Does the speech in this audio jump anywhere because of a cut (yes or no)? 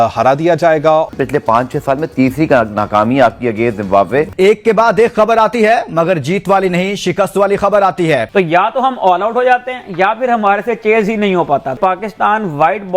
yes